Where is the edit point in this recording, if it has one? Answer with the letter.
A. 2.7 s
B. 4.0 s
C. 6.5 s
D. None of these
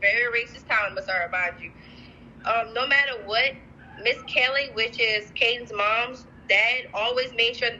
D